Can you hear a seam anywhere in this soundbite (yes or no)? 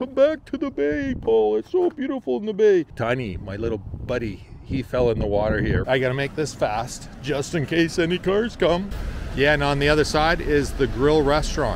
yes